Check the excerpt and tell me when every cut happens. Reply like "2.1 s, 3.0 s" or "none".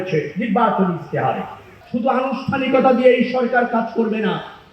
1.7 s